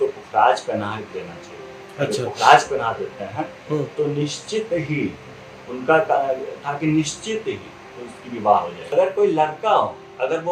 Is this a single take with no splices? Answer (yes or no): no